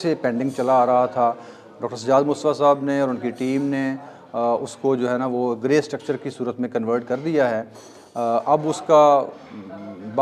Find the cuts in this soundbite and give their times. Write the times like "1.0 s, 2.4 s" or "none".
none